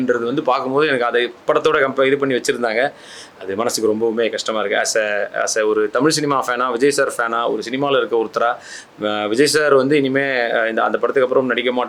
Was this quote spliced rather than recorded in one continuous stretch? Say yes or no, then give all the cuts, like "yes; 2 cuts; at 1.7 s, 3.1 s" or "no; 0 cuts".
no; 0 cuts